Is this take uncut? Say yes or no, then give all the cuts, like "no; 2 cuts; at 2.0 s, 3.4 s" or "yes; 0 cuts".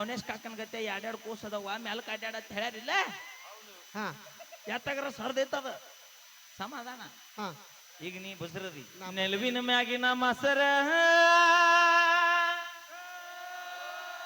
no; 1 cut; at 9.1 s